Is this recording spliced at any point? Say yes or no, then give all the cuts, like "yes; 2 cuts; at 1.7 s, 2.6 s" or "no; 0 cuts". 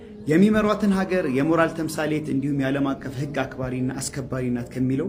no; 0 cuts